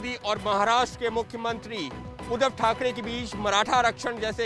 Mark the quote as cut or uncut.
uncut